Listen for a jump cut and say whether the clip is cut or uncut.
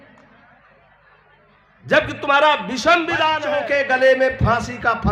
cut